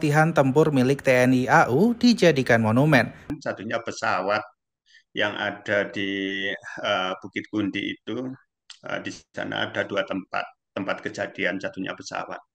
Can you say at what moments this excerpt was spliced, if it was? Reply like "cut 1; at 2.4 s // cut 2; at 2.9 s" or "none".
cut 1; at 3.3 s